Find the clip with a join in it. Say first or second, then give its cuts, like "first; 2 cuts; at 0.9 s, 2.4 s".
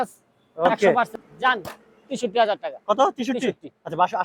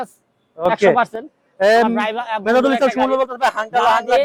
first; 1 cut; at 1.2 s